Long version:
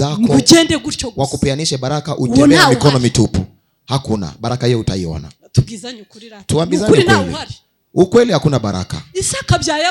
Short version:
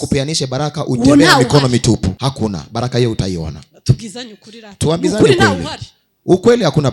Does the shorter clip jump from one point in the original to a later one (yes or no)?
yes